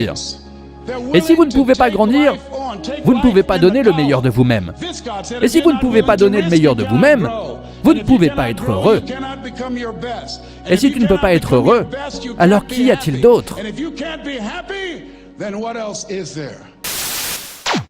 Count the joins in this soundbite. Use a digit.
1